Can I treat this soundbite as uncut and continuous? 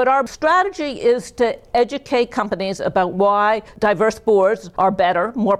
no; 1 cut; at 4.7 s

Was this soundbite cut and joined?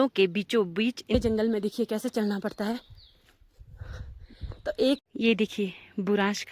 yes; 2 cuts; at 1.2 s, 5.1 s

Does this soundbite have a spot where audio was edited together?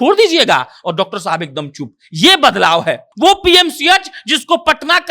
yes; 1 cut; at 3.1 s

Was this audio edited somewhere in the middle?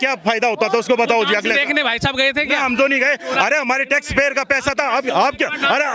no; 0 cuts

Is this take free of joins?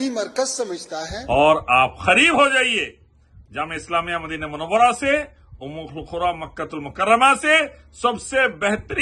no; 1 cut; at 1.1 s

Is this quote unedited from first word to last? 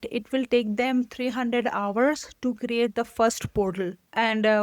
yes; 0 cuts

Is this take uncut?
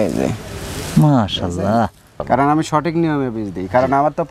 no; 1 cut; at 2.1 s

